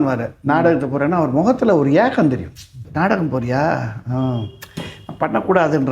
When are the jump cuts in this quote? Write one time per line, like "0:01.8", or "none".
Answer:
0:02.8